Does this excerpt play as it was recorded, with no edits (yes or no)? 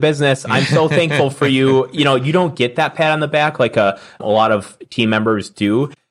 yes